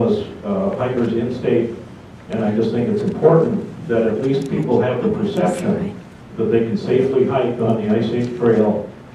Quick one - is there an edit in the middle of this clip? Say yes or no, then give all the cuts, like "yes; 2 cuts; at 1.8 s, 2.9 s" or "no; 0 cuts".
yes; 1 cut; at 7.1 s